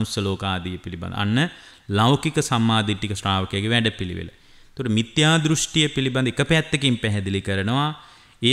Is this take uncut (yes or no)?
yes